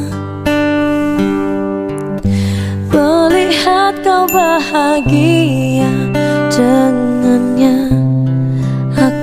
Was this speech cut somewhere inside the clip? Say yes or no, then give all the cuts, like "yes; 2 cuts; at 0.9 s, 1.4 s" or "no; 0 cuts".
no; 0 cuts